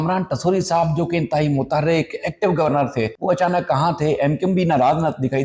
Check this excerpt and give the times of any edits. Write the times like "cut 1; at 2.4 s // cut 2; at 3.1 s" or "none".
cut 1; at 3.1 s